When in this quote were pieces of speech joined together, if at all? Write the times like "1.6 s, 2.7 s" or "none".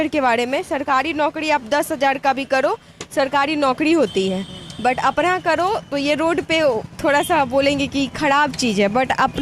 none